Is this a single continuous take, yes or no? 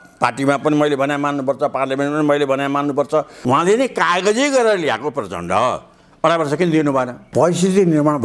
no